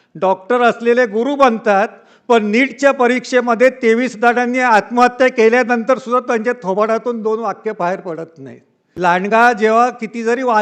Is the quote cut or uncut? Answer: cut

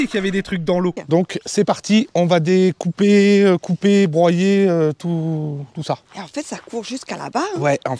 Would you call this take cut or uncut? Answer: cut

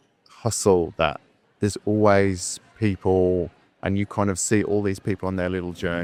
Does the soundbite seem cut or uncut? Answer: uncut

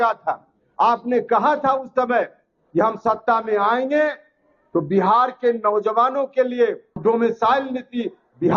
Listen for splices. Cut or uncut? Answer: cut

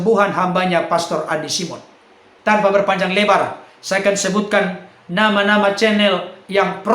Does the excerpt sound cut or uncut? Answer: cut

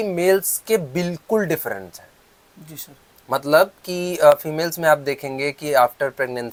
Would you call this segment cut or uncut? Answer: uncut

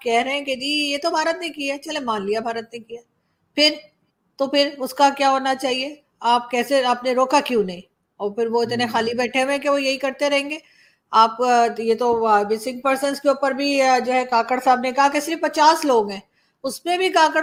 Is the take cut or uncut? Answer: uncut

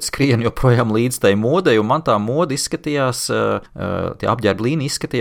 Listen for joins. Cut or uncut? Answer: cut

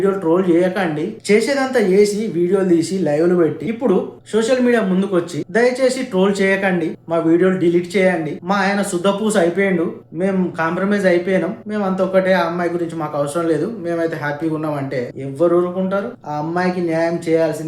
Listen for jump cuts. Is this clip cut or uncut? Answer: cut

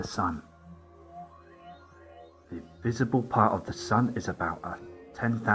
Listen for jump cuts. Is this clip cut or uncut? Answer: cut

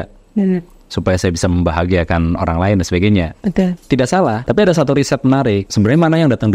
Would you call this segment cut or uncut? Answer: cut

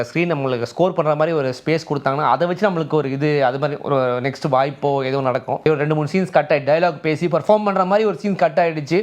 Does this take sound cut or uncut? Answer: cut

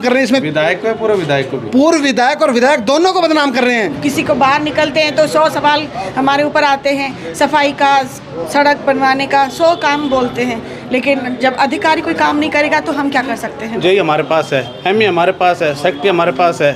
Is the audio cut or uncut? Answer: cut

